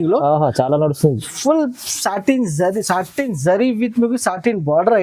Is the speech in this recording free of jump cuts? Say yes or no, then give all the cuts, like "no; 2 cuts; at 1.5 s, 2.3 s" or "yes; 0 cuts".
yes; 0 cuts